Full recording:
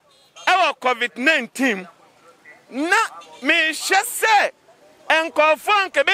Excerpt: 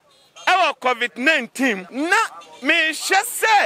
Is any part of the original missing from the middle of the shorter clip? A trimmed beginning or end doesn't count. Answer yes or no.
yes